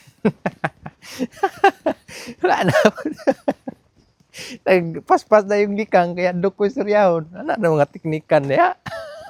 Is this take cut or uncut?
uncut